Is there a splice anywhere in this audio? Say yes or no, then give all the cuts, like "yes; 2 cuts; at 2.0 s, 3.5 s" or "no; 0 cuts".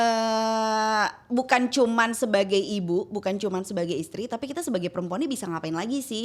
no; 0 cuts